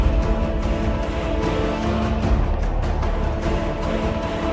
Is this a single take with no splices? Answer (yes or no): yes